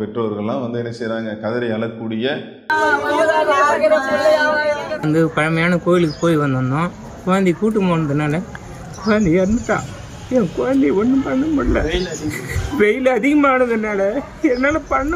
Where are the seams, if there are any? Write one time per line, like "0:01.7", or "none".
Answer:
none

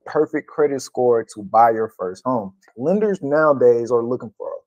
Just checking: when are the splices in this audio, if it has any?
0:02.7

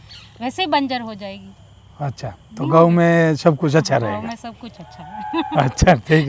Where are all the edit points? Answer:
none

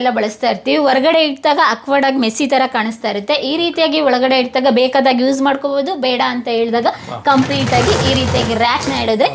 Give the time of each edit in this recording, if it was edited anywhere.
none

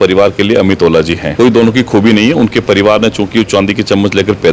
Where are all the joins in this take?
0:01.2

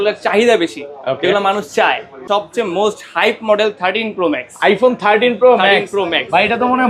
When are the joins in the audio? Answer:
0:02.2

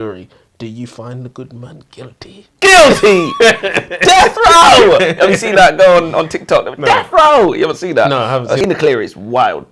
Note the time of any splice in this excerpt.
0:08.7

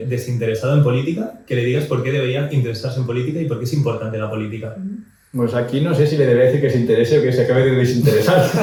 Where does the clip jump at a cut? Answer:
none

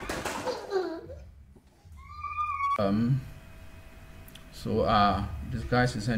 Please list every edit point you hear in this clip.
0:02.8

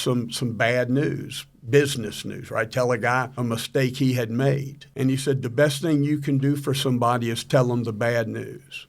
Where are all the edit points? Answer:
0:03.3
0:04.8

